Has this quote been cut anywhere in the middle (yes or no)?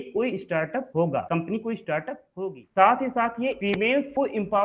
yes